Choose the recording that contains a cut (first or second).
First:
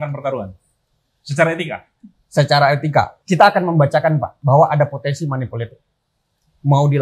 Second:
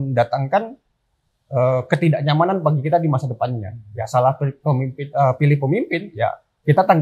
first